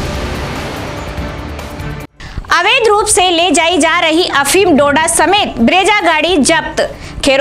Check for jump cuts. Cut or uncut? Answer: cut